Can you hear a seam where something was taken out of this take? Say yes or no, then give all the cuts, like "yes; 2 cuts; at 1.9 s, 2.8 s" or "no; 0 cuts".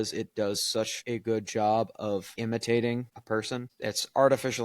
yes; 3 cuts; at 1.0 s, 2.3 s, 3.6 s